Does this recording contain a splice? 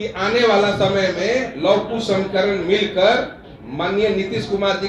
no; 0 cuts

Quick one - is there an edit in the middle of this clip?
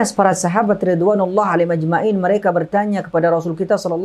no; 0 cuts

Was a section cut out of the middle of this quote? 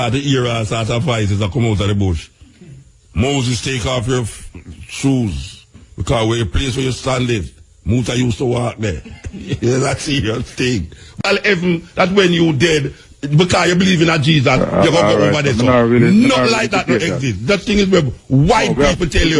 yes; 1 cut; at 11.2 s

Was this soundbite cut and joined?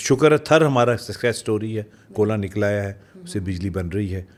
no; 0 cuts

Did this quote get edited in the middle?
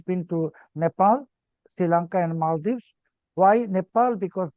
no; 0 cuts

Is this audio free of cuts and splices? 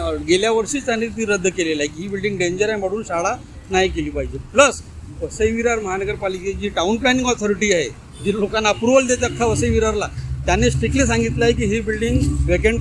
yes; 0 cuts

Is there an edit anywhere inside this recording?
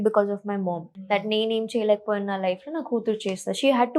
yes; 1 cut; at 0.9 s

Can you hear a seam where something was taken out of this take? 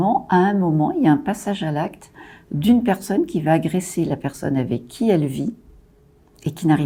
no; 0 cuts

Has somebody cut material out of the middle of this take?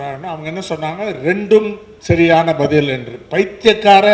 no; 0 cuts

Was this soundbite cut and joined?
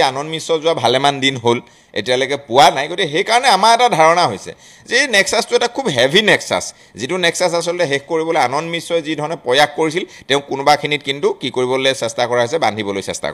no; 0 cuts

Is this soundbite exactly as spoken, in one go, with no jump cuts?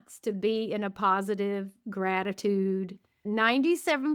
no; 1 cut; at 3.2 s

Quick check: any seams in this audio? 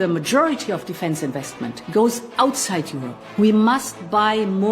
no; 0 cuts

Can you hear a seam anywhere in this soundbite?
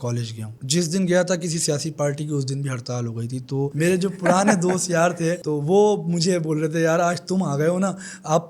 no; 0 cuts

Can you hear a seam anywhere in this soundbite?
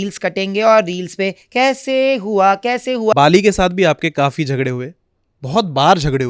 yes; 1 cut; at 3.1 s

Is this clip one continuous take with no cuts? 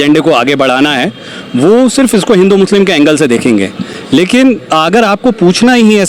yes; 0 cuts

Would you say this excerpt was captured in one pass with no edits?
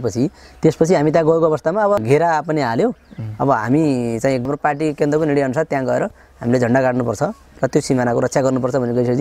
no; 2 cuts; at 2.0 s, 4.4 s

